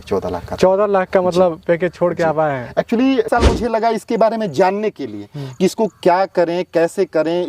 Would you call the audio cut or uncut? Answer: cut